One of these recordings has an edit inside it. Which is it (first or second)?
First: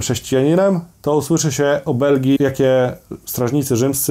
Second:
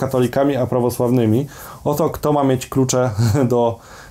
first